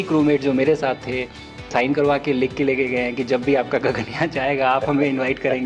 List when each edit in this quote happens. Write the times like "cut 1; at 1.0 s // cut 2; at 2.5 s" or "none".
cut 1; at 1.7 s